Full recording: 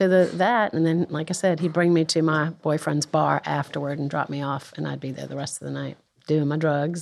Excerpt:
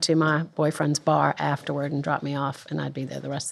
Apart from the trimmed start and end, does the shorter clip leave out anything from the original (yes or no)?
no